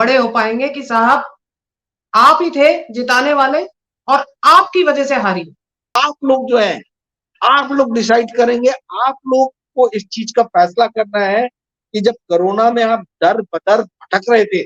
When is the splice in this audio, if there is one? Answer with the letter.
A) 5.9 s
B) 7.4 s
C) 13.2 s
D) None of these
A